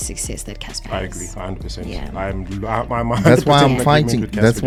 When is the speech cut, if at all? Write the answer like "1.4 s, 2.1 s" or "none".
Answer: none